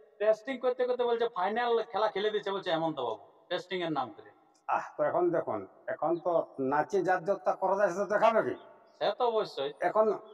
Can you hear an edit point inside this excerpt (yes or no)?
no